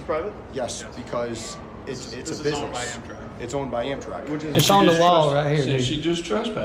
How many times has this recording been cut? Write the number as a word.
one